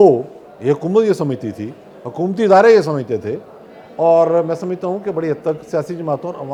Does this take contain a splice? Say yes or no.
no